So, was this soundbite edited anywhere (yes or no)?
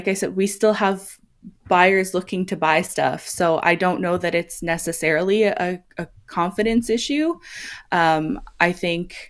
no